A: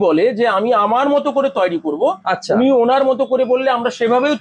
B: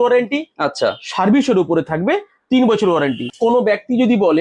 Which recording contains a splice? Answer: B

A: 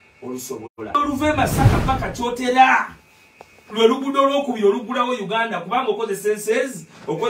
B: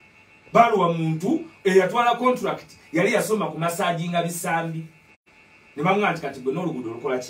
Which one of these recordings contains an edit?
A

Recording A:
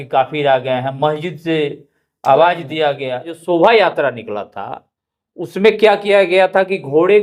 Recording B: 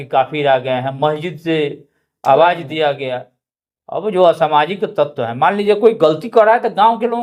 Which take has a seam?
A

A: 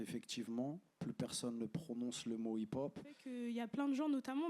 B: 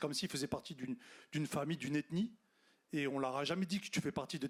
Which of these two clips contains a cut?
A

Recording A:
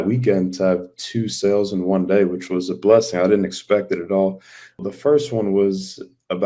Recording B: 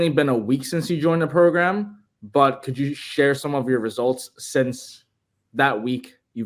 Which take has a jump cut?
A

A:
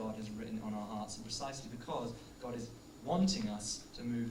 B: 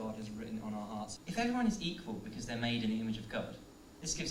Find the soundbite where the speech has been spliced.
B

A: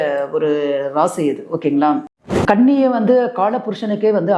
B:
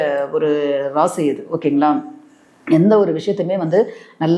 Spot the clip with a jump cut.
A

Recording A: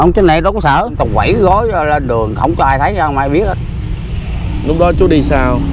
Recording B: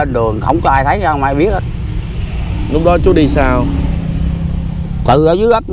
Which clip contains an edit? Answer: A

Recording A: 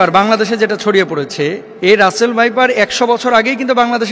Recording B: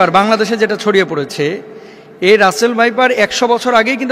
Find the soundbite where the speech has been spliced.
A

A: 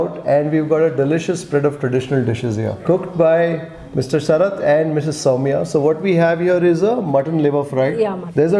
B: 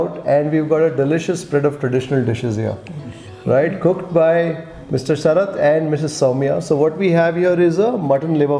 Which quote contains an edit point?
A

